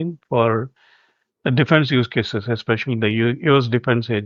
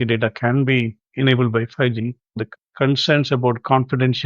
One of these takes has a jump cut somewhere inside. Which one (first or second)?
second